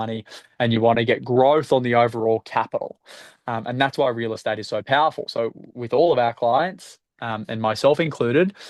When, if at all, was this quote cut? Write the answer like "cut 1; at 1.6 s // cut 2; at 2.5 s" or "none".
none